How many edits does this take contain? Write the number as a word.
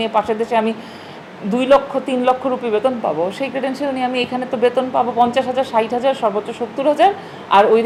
zero